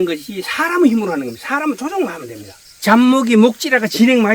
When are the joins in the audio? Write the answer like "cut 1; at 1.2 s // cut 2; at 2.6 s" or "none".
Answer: cut 1; at 2.7 s